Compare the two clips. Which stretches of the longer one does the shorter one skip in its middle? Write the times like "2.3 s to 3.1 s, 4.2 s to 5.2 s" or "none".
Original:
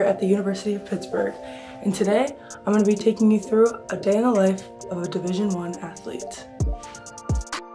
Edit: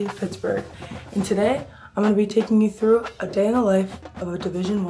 none